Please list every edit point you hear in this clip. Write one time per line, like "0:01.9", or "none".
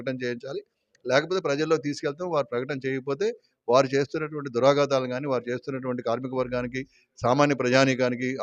none

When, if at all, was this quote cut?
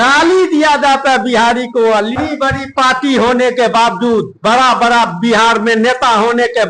0:02.2

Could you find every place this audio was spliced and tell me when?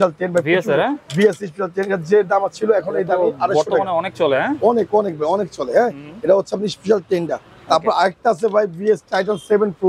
none

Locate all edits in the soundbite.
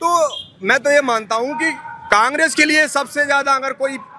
0:02.0

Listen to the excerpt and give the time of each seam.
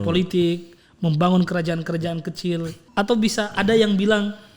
0:02.8

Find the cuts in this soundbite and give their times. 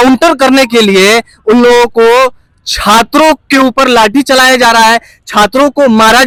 none

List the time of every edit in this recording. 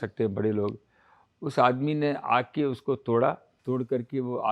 0:03.5

